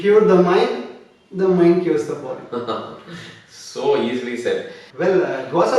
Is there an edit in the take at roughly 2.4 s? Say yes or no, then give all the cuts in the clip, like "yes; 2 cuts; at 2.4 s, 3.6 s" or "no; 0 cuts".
no; 1 cut; at 4.8 s